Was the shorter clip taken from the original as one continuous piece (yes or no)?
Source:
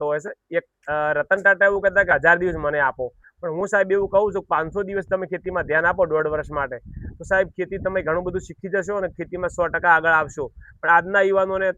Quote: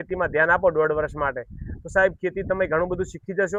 yes